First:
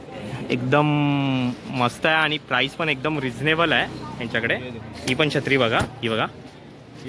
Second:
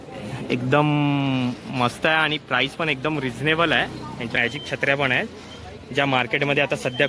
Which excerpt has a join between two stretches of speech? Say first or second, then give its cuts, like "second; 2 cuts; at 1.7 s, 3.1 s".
second; 1 cut; at 4.3 s